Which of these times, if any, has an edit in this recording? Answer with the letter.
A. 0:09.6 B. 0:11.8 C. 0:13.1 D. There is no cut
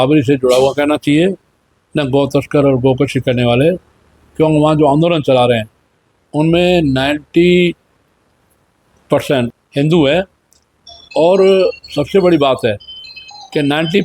A